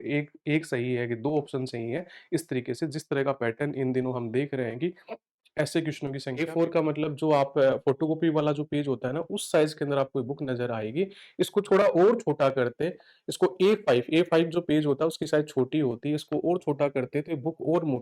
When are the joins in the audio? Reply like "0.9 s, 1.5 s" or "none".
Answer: 6.3 s